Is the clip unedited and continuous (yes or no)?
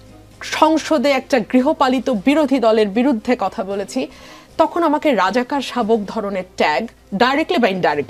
yes